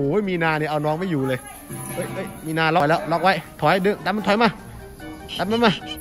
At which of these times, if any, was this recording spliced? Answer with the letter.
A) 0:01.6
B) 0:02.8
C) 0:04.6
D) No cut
B